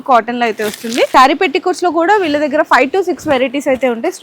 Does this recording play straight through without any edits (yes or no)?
no